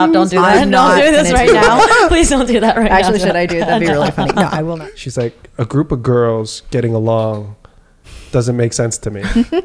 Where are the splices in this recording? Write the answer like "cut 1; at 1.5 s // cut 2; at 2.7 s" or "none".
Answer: cut 1; at 4.7 s